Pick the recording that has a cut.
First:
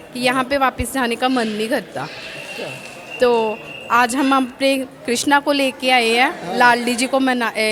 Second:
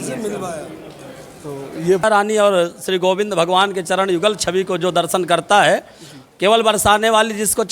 second; 1 cut; at 2.0 s

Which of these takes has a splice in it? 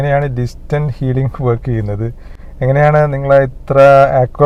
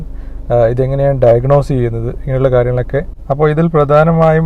second; 1 cut; at 3.1 s

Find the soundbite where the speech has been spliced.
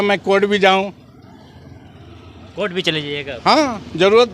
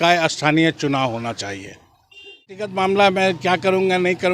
second; 1 cut; at 2.7 s

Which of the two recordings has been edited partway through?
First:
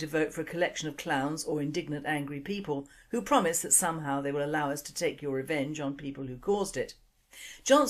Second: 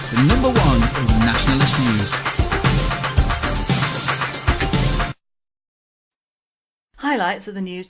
first; 1 cut; at 3.4 s

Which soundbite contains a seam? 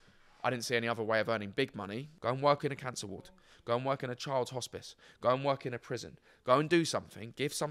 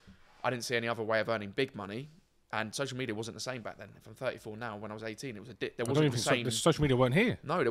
first; 1 cut; at 2.1 s

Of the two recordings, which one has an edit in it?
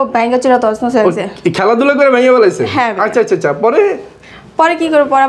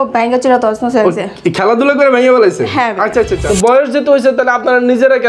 second; 1 cut; at 3.4 s

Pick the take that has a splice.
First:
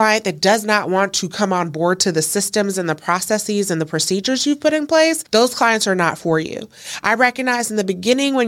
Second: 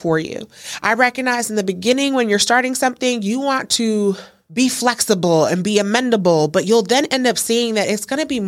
second; 1 cut; at 4.4 s

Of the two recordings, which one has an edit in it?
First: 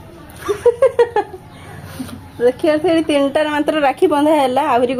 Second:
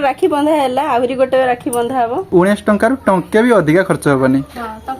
second; 1 cut; at 2.3 s

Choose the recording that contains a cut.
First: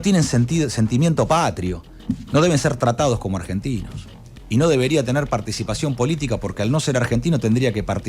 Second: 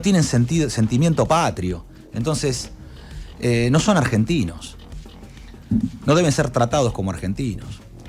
first; 1 cut; at 2.1 s

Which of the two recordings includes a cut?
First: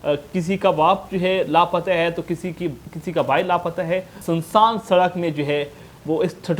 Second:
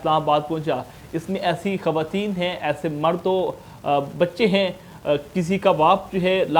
first; 1 cut; at 4.1 s

